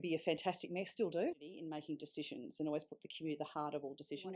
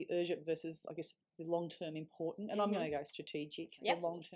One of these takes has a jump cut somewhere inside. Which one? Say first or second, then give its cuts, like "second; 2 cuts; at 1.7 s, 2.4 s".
first; 1 cut; at 1.3 s